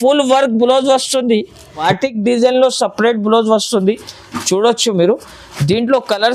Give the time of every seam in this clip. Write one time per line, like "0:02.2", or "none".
0:01.7